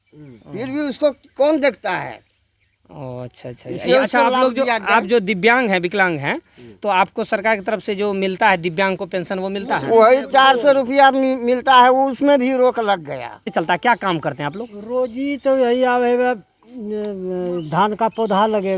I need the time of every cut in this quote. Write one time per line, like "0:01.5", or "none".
0:13.5